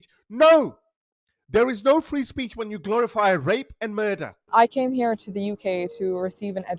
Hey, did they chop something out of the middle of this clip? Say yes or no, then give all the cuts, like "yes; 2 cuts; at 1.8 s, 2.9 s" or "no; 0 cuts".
yes; 1 cut; at 4.3 s